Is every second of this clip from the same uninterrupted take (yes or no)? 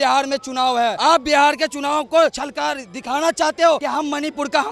no